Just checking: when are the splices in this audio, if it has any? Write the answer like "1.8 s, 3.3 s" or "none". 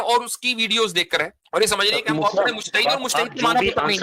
1.4 s